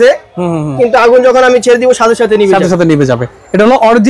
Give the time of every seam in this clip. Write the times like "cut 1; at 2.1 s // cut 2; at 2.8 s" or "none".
none